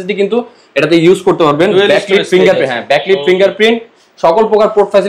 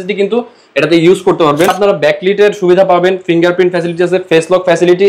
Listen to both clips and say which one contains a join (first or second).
second